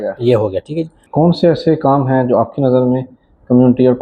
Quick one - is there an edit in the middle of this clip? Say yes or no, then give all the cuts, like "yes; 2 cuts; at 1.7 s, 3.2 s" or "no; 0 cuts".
yes; 1 cut; at 1.0 s